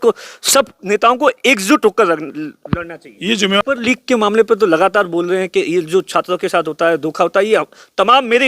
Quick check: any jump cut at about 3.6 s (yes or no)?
yes